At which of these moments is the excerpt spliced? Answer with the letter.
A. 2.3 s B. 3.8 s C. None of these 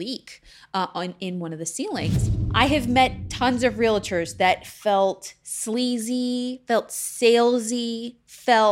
A